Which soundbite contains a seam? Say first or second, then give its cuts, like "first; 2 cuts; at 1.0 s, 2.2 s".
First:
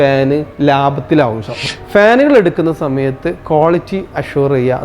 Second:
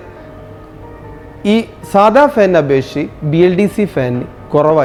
first; 1 cut; at 1.7 s